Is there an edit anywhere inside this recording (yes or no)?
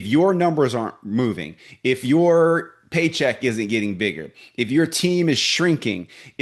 no